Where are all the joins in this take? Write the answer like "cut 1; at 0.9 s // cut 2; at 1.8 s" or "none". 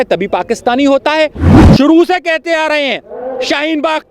cut 1; at 1.5 s